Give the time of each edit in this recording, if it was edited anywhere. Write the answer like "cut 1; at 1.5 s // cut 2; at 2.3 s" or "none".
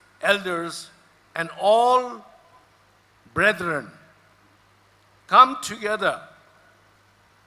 cut 1; at 3.2 s